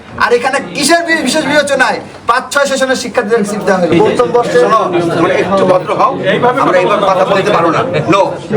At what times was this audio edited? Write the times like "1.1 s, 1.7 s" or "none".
3.9 s